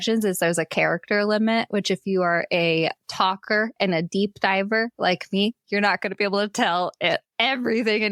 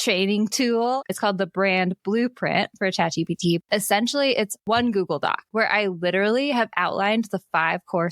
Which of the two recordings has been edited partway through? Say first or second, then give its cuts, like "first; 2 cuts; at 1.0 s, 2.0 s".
second; 4 cuts; at 1.0 s, 3.6 s, 4.6 s, 5.5 s